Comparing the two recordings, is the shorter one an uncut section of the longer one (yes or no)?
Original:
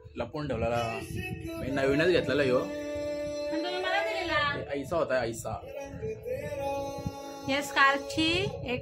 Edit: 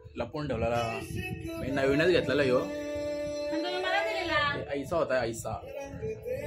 yes